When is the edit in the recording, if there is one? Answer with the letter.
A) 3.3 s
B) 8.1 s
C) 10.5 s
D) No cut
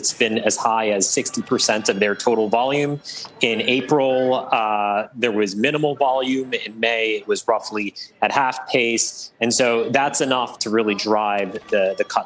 D